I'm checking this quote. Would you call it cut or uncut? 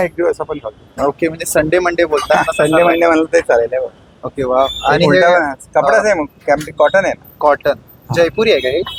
uncut